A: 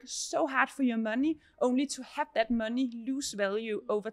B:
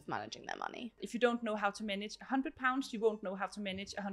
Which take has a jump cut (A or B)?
B